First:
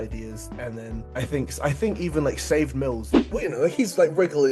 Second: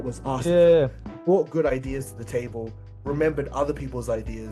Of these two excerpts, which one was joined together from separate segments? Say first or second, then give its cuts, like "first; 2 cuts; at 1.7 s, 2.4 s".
first; 1 cut; at 3.3 s